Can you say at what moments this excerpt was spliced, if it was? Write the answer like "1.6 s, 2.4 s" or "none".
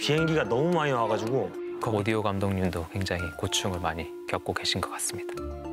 1.8 s